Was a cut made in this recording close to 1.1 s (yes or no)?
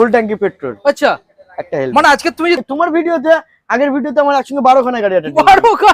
no